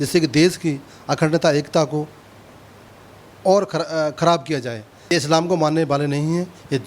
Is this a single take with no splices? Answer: no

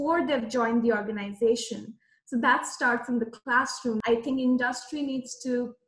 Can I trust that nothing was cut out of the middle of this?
no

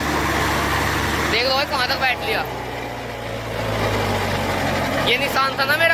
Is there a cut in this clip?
no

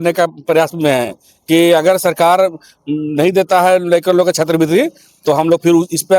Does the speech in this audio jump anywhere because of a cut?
no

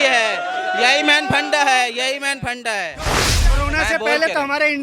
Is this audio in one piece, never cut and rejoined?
no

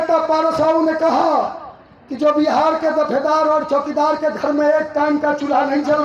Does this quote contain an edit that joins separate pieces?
no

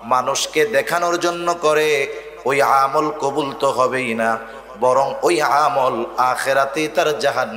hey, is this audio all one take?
yes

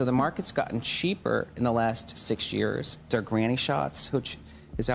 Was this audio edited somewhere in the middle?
yes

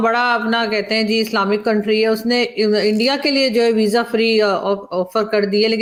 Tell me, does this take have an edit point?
no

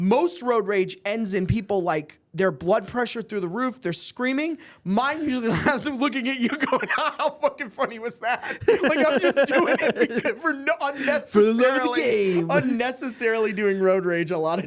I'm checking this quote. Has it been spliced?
no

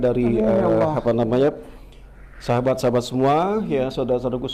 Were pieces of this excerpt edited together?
no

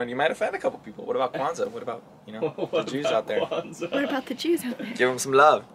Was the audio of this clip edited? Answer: no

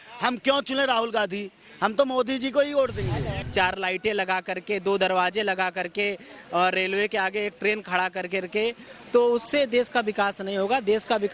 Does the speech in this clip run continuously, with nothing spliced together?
no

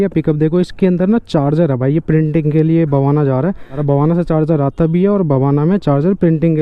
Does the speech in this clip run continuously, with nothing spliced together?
yes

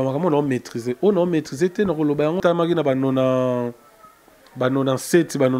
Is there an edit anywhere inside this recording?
yes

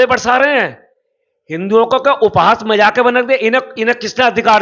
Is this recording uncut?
yes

